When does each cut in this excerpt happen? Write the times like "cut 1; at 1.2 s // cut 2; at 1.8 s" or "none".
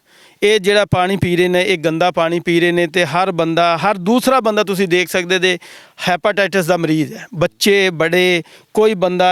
none